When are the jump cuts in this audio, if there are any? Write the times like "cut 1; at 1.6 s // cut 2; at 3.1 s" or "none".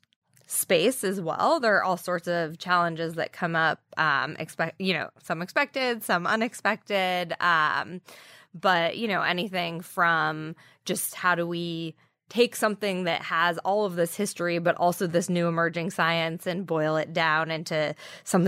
none